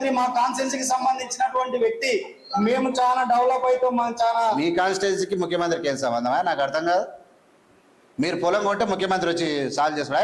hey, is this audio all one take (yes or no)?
yes